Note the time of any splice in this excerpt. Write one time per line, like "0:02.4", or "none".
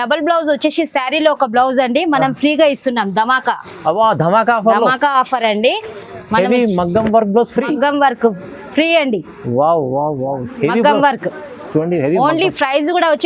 none